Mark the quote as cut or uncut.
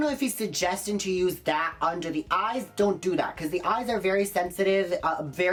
uncut